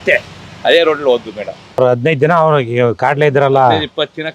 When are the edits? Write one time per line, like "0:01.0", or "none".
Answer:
0:01.8

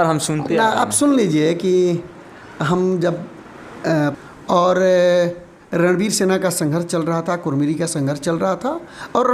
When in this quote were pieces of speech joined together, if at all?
0:04.2

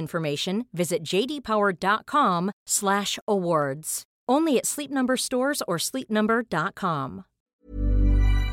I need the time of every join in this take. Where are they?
0:07.5

